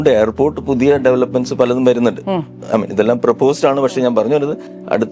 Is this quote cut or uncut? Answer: uncut